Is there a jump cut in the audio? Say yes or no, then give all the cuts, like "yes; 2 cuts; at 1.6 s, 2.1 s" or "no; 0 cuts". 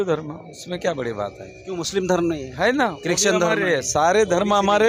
no; 0 cuts